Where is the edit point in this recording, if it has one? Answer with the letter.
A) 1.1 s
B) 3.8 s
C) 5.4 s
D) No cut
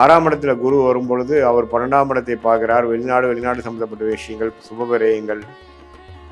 D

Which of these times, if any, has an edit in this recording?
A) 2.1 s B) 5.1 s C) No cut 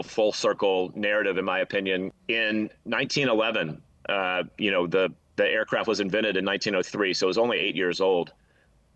A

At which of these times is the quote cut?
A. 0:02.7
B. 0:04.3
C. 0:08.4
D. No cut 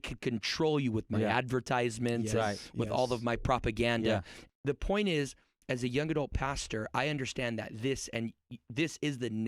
B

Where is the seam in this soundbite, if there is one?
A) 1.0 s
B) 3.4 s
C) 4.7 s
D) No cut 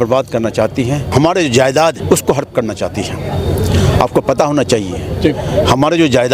D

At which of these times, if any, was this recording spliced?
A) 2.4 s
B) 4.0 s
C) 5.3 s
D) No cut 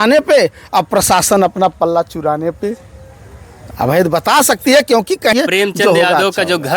C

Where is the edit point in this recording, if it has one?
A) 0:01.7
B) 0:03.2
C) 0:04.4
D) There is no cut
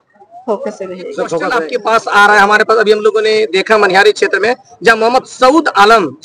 A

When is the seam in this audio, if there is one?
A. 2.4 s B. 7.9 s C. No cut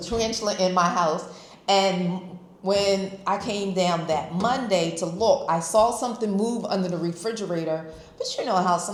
C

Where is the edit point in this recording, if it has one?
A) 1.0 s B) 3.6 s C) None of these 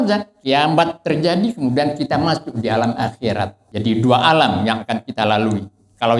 B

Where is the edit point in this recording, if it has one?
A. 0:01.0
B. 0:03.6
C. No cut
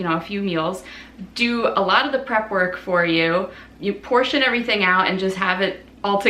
C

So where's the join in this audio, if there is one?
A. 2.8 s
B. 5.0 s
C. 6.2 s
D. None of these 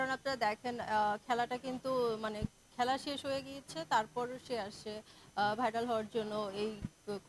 D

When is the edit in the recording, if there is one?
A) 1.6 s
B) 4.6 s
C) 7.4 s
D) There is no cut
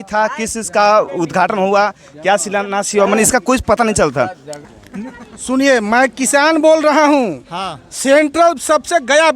B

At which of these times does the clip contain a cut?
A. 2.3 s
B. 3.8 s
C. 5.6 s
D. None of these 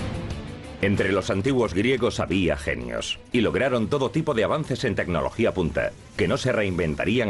D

